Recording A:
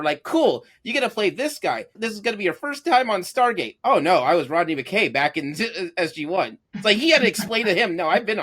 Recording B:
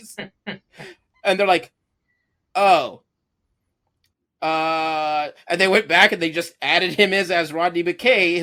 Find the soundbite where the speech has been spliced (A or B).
A